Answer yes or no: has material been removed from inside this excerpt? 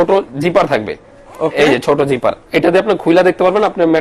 no